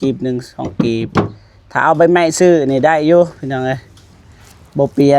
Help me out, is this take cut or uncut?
uncut